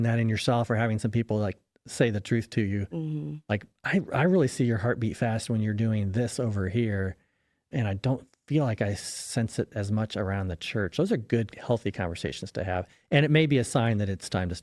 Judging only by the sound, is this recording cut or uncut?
uncut